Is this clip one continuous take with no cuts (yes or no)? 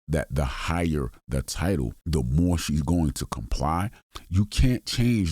no